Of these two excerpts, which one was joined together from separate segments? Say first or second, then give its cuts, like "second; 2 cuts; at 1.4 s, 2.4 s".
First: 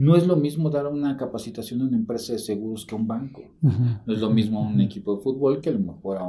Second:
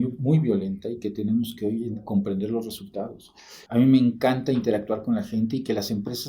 second; 1 cut; at 3.5 s